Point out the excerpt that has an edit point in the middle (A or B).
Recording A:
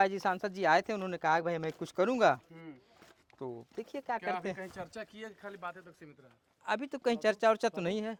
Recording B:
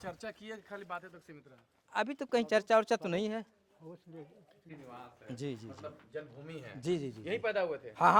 B